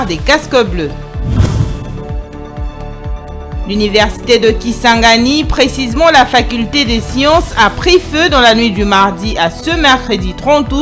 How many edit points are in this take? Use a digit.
1